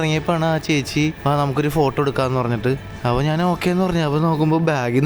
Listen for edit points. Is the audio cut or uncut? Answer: cut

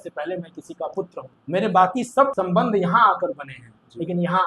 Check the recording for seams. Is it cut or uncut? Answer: cut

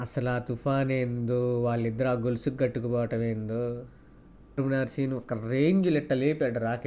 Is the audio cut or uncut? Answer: cut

